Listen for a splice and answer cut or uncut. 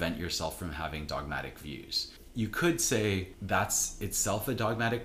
cut